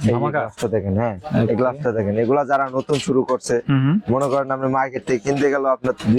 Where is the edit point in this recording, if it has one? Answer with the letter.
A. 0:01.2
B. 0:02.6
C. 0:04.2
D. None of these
D